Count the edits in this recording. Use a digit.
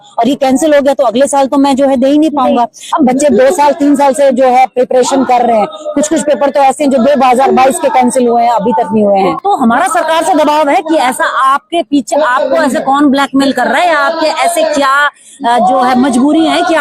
2